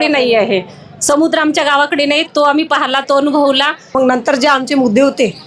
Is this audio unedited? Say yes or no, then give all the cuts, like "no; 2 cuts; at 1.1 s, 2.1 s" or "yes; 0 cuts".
no; 1 cut; at 4.0 s